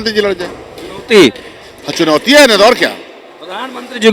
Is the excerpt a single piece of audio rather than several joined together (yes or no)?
yes